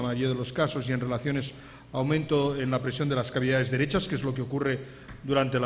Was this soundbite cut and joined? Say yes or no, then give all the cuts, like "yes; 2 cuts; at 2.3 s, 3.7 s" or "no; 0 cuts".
no; 0 cuts